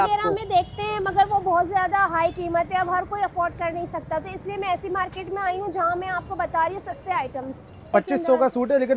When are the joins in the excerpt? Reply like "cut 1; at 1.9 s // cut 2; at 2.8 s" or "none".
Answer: cut 1; at 7.8 s

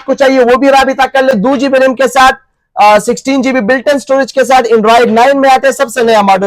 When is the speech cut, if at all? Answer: cut 1; at 1.3 s

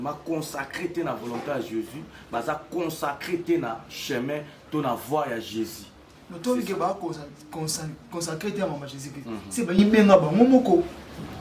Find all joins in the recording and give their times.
none

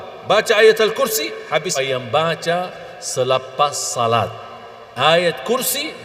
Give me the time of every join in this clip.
cut 1; at 1.7 s

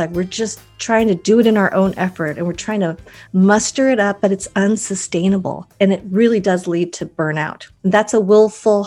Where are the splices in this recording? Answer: cut 1; at 5.6 s // cut 2; at 7.6 s

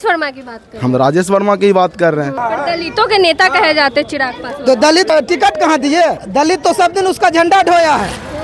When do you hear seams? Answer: cut 1; at 2.4 s // cut 2; at 5.1 s // cut 3; at 6.2 s

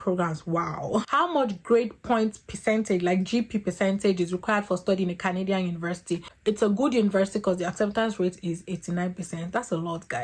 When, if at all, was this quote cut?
cut 1; at 1.0 s // cut 2; at 6.2 s

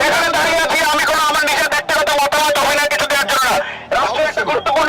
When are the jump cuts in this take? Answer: none

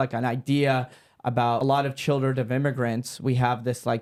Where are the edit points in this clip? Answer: none

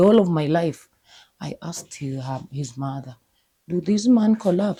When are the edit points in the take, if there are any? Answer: none

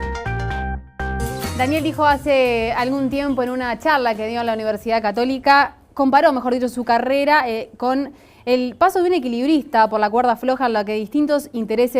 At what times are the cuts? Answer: cut 1; at 1.2 s

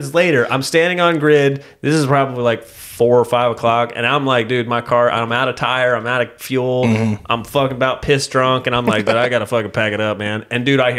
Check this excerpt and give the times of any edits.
none

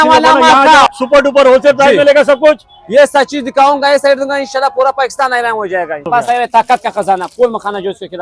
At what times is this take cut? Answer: cut 1; at 0.9 s // cut 2; at 6.1 s

